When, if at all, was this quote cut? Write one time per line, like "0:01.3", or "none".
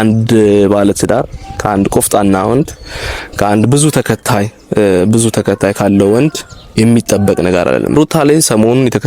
0:08.0